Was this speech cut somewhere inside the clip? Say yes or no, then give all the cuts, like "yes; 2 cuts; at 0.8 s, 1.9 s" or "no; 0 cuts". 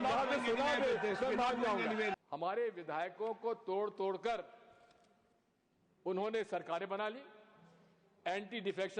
yes; 1 cut; at 2.1 s